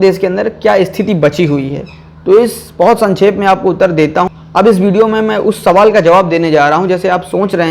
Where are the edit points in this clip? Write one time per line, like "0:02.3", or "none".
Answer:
0:04.3